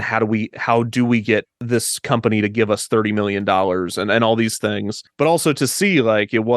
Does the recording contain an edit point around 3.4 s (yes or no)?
no